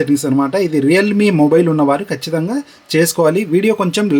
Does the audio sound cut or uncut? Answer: uncut